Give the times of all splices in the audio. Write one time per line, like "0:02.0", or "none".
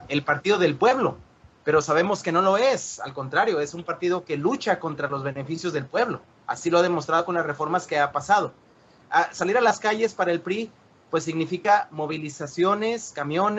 none